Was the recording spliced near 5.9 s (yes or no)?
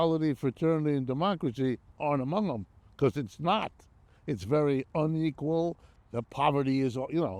yes